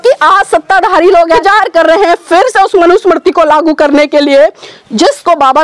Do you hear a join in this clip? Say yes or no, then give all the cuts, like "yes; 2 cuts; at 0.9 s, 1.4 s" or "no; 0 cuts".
yes; 1 cut; at 1.4 s